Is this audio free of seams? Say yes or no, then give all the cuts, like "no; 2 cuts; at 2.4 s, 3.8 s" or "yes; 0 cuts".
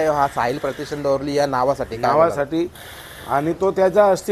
yes; 0 cuts